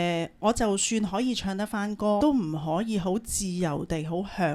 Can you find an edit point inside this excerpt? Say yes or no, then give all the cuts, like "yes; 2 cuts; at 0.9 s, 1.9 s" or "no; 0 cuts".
yes; 1 cut; at 2.2 s